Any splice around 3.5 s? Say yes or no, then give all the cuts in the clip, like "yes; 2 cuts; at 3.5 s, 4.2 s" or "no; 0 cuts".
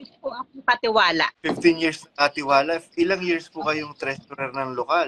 no; 0 cuts